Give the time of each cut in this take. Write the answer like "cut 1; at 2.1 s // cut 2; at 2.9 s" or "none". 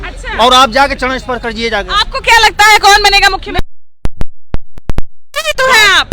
none

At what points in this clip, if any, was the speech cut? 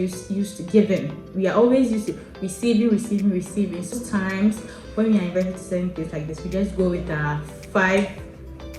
cut 1; at 4.0 s

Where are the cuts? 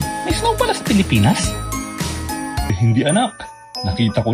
cut 1; at 2.8 s

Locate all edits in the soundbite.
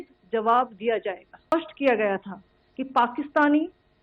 cut 1; at 1.5 s

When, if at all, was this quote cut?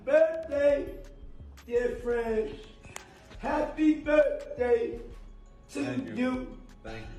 none

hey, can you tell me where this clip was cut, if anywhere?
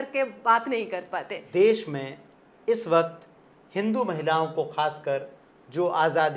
cut 1; at 1.4 s

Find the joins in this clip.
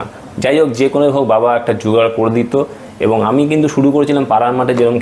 none

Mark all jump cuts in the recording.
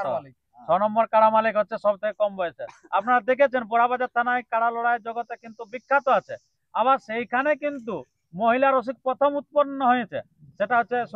none

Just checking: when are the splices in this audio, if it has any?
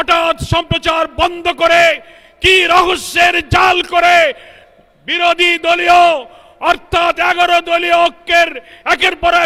none

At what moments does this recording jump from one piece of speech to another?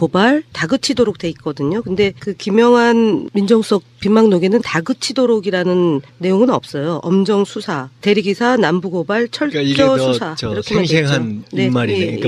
none

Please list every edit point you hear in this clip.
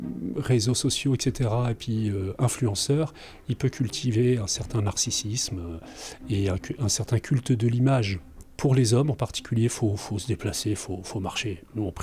cut 1; at 8.4 s

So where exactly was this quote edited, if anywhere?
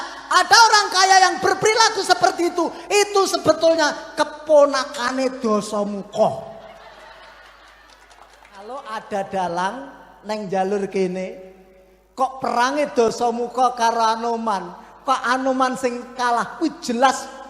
cut 1; at 8.9 s

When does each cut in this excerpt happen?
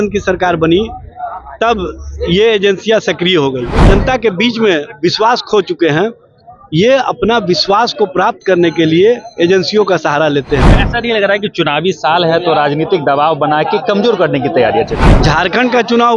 cut 1; at 3.8 s // cut 2; at 15.0 s

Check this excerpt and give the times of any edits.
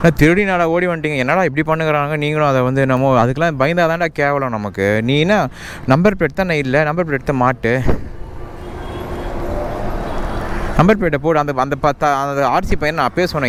none

